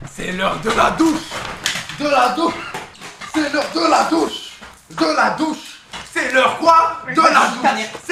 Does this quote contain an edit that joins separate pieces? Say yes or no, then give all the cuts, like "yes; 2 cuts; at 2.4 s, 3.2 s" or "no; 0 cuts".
no; 0 cuts